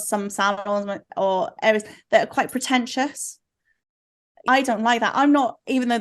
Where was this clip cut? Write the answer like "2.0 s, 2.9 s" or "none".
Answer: 4.4 s